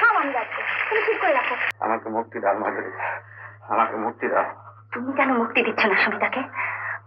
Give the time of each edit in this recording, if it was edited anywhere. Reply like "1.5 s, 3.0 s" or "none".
1.6 s